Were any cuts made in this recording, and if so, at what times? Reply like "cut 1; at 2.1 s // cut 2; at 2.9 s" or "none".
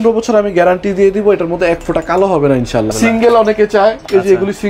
cut 1; at 2.9 s